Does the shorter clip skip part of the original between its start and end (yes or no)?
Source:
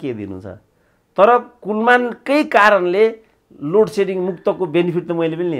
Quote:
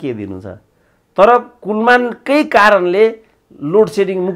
no